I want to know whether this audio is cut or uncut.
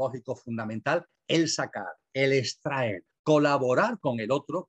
cut